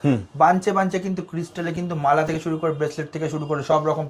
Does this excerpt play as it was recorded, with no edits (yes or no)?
yes